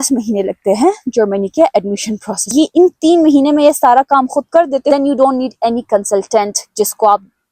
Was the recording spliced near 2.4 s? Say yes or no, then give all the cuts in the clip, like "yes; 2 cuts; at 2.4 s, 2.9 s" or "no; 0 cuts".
yes; 2 cuts; at 2.4 s, 4.9 s